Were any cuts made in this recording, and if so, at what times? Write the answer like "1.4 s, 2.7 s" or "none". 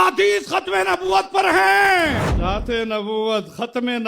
2.3 s